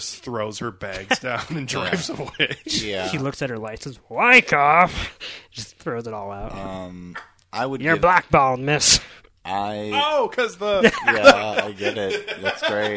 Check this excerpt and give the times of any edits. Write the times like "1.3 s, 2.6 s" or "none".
none